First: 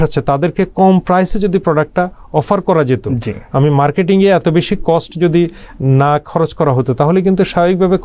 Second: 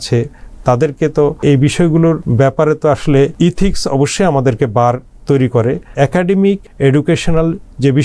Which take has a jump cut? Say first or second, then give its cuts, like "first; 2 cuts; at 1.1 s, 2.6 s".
second; 5 cuts; at 1.4 s, 2.2 s, 3.3 s, 5.9 s, 6.7 s